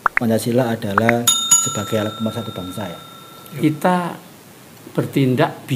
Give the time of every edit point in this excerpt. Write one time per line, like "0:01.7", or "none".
0:03.6